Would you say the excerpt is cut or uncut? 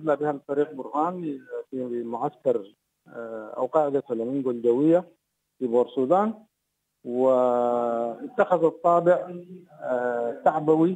uncut